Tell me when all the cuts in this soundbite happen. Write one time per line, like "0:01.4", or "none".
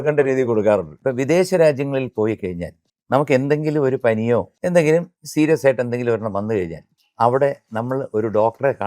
0:00.9
0:04.5
0:05.2